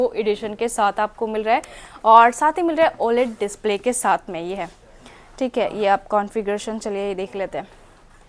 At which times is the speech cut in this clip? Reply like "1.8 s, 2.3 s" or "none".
none